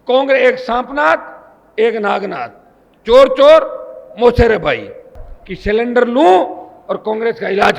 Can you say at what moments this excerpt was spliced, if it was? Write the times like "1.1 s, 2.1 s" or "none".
5.1 s